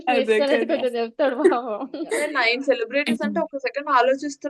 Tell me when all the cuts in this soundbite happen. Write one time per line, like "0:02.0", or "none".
0:02.2